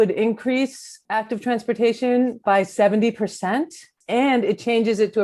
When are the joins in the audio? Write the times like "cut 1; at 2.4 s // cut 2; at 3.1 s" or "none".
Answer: cut 1; at 4.0 s